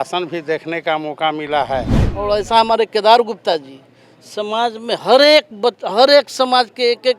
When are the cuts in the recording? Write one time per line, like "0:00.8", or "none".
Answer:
0:02.1